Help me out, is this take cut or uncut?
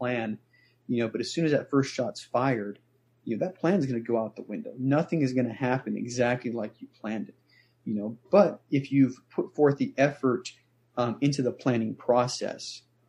uncut